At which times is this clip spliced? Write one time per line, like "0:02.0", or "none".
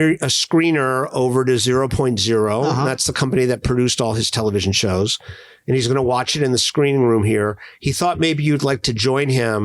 none